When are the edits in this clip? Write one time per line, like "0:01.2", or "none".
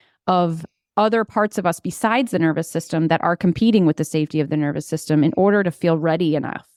none